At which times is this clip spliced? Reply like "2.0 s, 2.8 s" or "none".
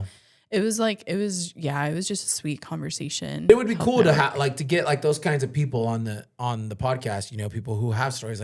3.5 s